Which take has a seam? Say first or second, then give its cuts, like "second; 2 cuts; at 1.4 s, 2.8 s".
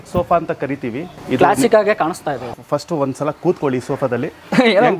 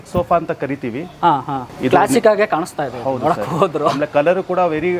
first; 2 cuts; at 1.1 s, 2.5 s